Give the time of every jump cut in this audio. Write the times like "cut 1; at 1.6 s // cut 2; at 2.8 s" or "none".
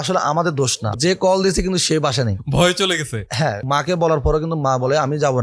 cut 1; at 0.9 s // cut 2; at 2.4 s // cut 3; at 3.6 s